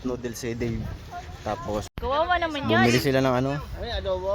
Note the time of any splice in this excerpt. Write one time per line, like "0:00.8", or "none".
0:01.9